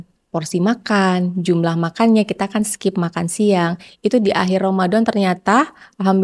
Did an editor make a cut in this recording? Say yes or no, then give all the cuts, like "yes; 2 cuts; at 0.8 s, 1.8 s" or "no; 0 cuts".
no; 0 cuts